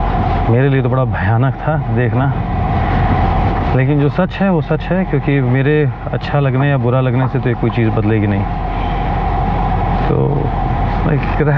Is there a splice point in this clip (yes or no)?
no